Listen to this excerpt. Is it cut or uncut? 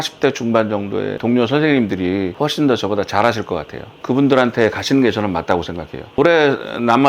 cut